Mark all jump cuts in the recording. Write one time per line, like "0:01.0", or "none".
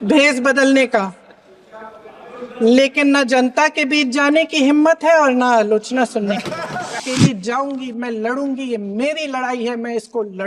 0:07.0